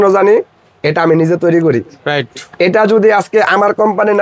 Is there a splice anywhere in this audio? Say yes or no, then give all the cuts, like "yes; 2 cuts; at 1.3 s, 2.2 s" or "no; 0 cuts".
no; 0 cuts